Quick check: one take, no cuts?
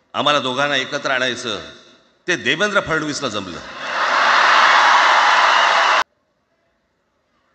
no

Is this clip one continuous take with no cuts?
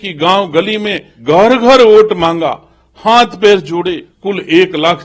no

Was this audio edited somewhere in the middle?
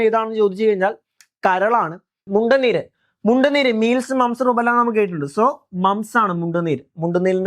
yes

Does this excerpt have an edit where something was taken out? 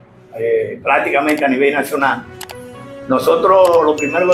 no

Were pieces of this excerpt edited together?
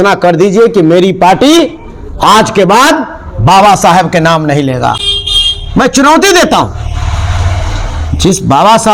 no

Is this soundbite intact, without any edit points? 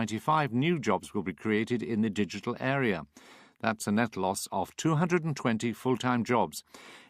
no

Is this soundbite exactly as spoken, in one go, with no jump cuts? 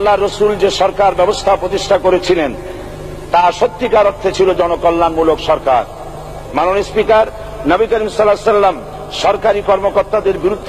no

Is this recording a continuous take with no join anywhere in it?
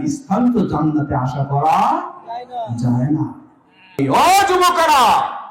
no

